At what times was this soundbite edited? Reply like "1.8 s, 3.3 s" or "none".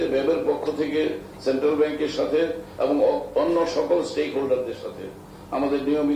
none

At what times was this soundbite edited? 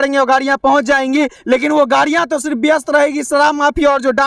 1.4 s

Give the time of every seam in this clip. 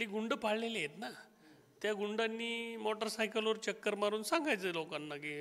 none

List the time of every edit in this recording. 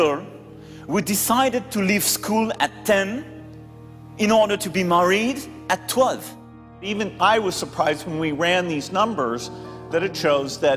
6.9 s

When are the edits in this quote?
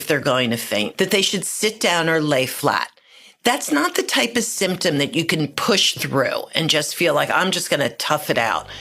0.9 s

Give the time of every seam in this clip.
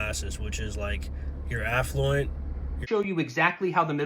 2.8 s

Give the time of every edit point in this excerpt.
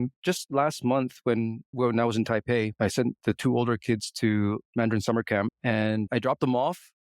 2.7 s, 4.7 s

